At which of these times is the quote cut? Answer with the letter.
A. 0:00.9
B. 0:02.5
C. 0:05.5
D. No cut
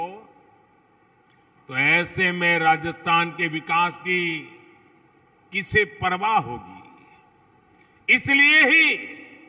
D